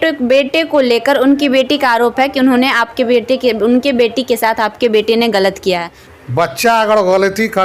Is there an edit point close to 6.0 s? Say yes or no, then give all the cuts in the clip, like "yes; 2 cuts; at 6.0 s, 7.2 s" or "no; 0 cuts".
yes; 1 cut; at 6.0 s